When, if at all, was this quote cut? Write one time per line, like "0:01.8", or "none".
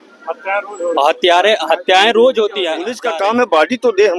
0:02.9